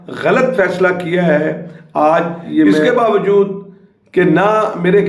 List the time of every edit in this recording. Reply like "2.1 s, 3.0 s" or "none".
2.9 s

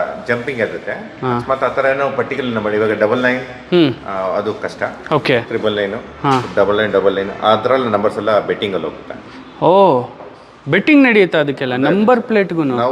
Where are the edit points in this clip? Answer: none

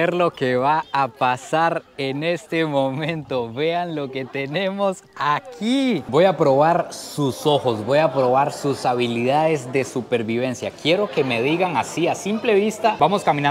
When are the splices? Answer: 6.0 s

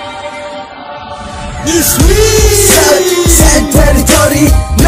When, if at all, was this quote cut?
none

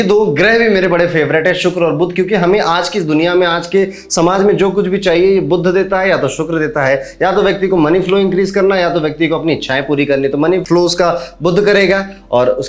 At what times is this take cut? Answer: none

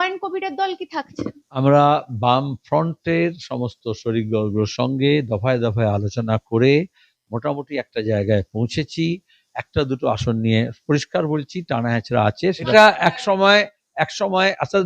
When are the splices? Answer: 1.6 s, 12.7 s

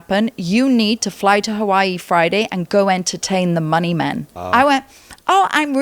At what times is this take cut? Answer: 4.3 s

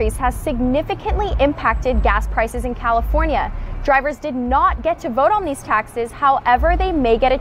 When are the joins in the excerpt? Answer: none

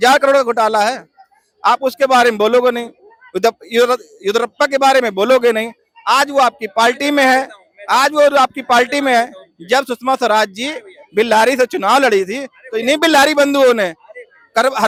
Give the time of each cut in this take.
none

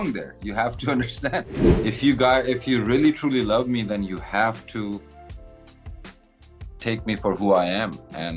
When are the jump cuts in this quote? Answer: 1.6 s

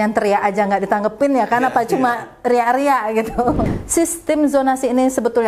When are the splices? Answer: 3.7 s

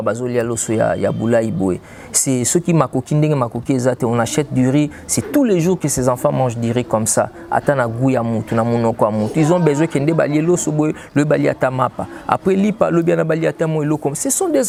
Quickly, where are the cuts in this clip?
none

